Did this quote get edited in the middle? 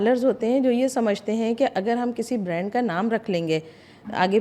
no; 0 cuts

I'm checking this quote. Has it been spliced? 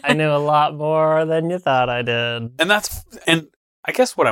no; 0 cuts

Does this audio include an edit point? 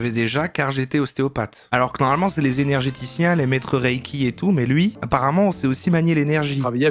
no; 0 cuts

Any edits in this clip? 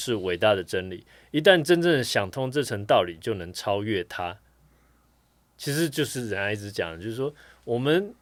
no; 0 cuts

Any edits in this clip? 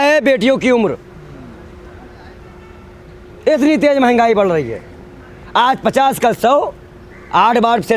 no; 0 cuts

